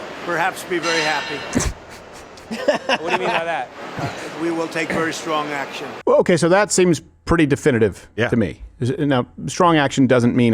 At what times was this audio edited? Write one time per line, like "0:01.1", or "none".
0:05.9